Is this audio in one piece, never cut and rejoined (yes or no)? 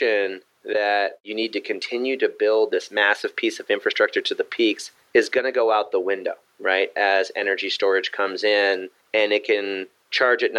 no